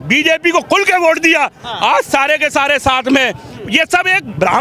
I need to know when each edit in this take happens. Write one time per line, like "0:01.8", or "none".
none